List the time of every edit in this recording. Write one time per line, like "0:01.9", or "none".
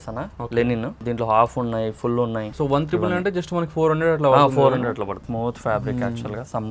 0:01.0
0:02.5
0:05.2